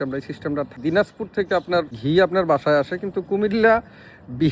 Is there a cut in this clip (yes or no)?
yes